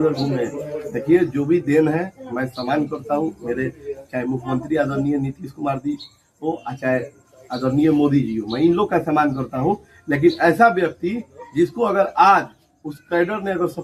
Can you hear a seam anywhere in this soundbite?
no; 0 cuts

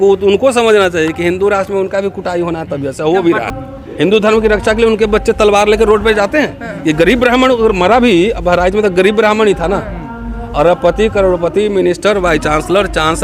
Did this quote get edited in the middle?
yes; 1 cut; at 3.5 s

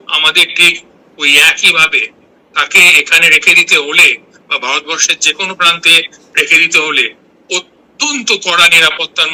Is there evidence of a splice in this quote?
no; 0 cuts

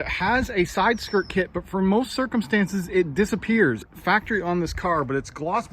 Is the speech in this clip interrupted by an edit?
no; 0 cuts

